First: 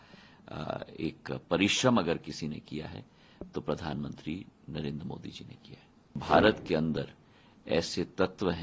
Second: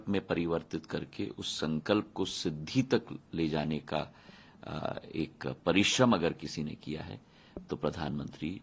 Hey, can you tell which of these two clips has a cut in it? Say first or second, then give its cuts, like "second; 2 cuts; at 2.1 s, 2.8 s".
first; 1 cut; at 6.2 s